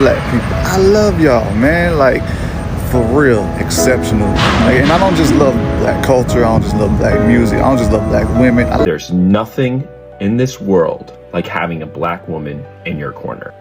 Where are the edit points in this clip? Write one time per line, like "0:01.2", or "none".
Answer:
0:08.8